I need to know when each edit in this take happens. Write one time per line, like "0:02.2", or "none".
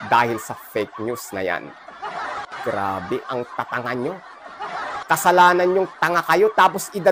none